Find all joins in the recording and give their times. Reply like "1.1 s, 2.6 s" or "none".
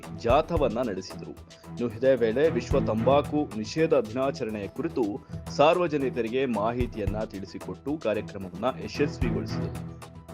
9.1 s